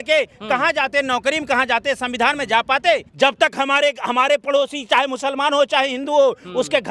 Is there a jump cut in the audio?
yes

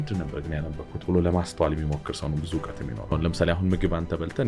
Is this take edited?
yes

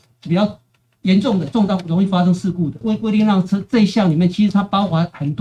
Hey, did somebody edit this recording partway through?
yes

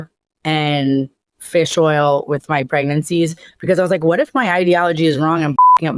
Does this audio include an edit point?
no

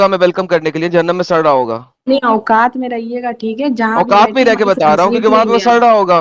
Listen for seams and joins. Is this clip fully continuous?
yes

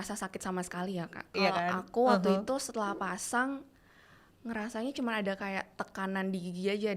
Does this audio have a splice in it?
yes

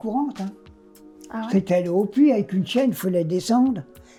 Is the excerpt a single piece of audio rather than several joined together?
yes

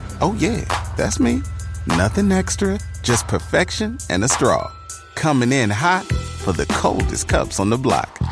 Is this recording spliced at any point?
no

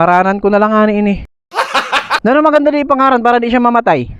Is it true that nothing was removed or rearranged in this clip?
no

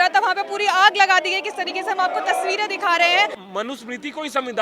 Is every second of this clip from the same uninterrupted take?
no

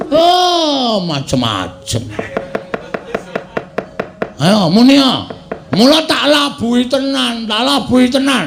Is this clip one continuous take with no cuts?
yes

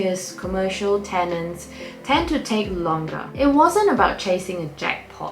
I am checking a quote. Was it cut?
yes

